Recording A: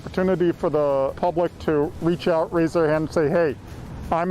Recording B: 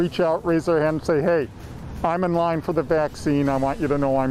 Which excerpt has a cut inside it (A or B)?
A